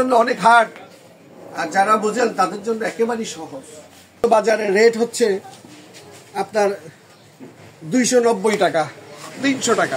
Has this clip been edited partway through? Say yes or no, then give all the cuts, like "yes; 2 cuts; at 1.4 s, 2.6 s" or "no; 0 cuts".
yes; 1 cut; at 4.2 s